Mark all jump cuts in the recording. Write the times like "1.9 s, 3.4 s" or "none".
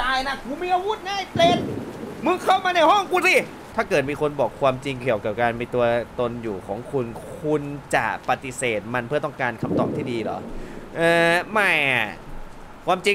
3.6 s